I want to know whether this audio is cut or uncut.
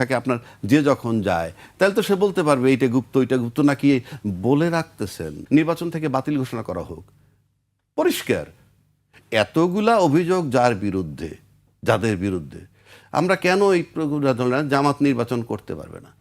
cut